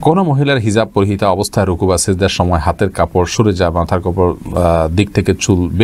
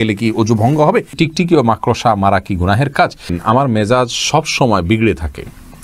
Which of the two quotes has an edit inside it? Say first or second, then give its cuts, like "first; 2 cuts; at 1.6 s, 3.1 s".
second; 2 cuts; at 1.1 s, 3.4 s